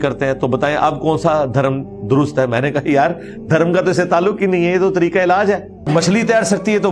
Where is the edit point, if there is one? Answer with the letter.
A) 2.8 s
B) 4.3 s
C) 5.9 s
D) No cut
C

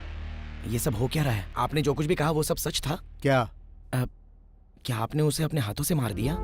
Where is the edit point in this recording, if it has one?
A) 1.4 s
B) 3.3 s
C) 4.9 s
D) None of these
A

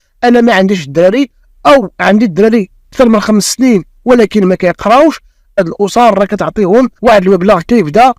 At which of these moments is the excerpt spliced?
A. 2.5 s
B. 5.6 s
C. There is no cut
B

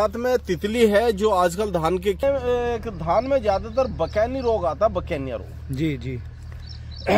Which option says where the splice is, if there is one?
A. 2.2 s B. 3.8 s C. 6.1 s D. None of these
A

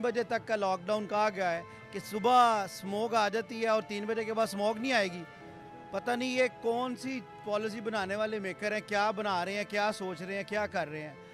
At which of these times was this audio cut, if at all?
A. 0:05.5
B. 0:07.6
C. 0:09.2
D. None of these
D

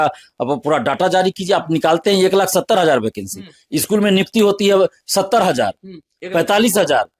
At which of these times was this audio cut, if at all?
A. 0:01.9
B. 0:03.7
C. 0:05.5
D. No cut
D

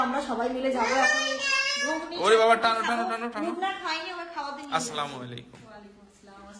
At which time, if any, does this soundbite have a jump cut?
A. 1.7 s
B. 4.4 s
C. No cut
C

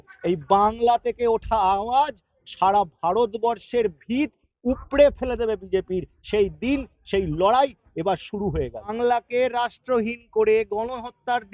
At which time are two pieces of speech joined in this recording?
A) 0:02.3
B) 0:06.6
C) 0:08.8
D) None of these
C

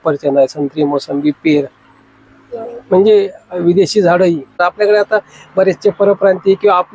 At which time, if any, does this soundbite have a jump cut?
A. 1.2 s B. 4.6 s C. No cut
B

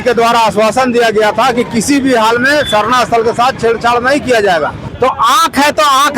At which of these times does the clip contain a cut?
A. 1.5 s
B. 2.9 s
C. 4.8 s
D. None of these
C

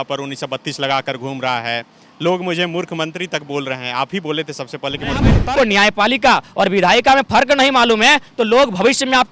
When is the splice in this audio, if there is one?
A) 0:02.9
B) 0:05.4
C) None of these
B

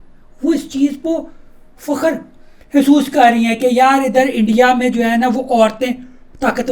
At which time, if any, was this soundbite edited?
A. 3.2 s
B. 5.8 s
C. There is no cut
C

